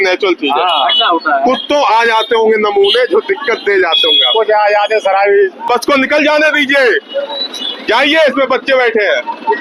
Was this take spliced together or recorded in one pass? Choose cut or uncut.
cut